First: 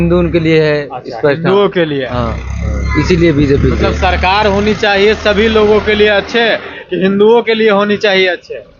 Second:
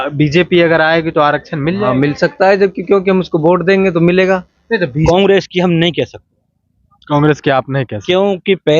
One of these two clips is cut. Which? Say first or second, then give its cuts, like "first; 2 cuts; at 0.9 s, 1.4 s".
second; 1 cut; at 5.0 s